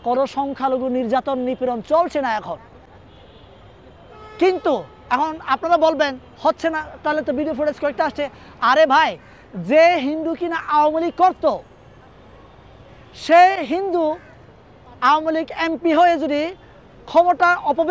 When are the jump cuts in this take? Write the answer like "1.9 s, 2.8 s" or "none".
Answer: none